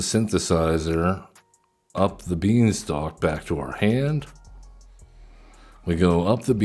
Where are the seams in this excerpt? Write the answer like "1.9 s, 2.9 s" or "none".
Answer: 5.7 s